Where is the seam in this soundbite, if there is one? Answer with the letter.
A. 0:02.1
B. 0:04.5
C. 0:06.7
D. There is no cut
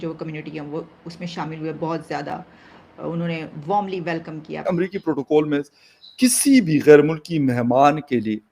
B